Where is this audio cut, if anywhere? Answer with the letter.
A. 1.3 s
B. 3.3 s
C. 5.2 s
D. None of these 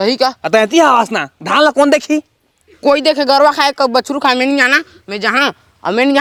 D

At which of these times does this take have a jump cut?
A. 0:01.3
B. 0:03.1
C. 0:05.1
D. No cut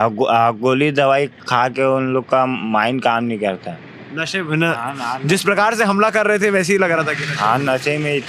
D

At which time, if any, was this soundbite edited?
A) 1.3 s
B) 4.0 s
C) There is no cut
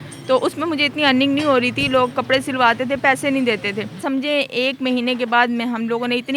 B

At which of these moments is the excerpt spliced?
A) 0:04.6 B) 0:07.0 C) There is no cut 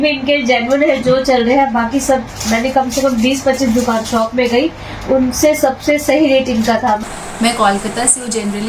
B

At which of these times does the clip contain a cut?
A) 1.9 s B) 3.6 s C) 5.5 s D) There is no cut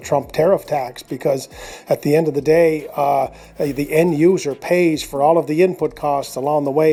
D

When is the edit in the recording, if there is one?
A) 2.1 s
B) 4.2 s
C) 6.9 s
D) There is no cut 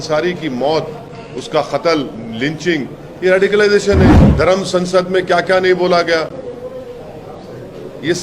B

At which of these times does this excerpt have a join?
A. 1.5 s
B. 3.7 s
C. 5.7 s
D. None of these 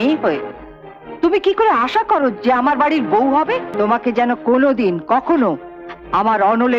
B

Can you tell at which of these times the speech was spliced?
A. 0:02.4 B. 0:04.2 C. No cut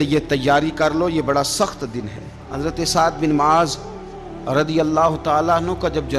A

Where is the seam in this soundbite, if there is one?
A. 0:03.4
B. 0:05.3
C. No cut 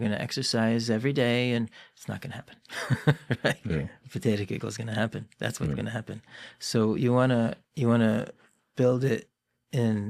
C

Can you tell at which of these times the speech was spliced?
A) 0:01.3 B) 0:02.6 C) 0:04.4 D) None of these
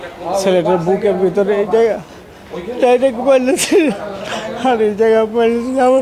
D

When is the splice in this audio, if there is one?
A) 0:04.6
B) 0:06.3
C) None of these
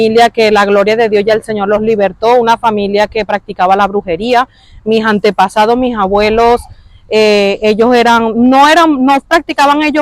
C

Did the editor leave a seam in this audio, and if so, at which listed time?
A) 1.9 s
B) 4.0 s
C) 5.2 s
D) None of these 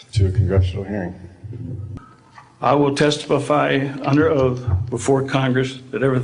A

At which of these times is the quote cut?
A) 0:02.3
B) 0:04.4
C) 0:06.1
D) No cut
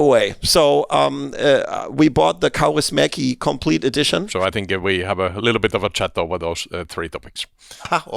D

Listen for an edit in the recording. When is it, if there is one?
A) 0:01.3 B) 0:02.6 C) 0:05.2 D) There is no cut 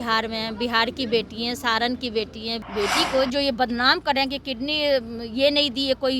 B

